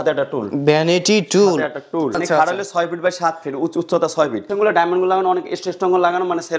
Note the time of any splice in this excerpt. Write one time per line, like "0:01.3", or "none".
0:02.2
0:04.5